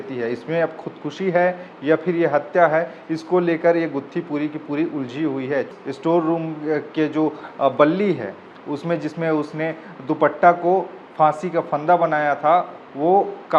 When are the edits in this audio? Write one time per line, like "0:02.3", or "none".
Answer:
0:05.7